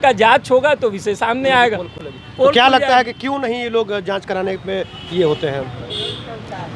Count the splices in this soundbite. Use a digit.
0